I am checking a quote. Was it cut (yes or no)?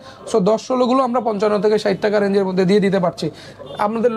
no